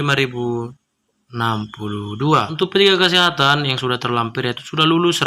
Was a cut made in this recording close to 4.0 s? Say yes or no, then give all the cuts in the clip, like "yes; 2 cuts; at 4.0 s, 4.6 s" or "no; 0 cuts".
no; 1 cut; at 2.5 s